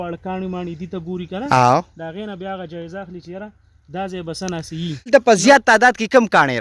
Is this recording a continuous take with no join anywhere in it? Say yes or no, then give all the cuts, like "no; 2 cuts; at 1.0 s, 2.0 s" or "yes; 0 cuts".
no; 1 cut; at 5.1 s